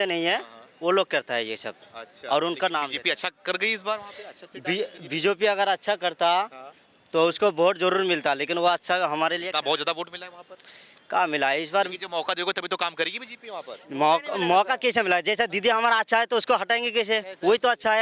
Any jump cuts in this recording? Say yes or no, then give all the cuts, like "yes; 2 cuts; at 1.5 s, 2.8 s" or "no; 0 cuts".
no; 0 cuts